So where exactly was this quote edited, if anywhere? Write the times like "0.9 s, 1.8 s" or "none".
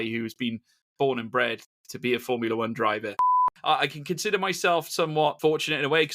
3.3 s, 5.4 s

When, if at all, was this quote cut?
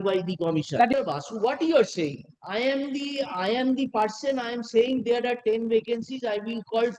0.9 s

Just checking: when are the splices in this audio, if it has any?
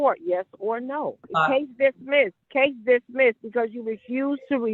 1.3 s, 2.4 s

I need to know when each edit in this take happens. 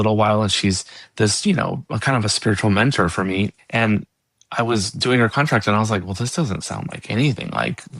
3.6 s

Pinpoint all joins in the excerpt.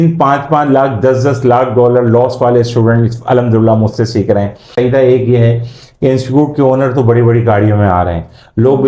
4.7 s

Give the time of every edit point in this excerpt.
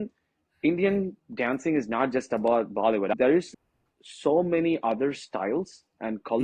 3.1 s

